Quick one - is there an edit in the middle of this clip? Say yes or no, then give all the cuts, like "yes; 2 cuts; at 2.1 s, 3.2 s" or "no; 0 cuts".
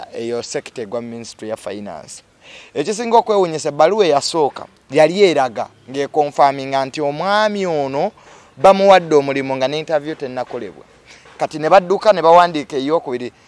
no; 0 cuts